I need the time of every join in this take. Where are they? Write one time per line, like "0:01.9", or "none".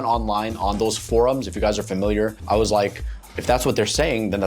0:02.4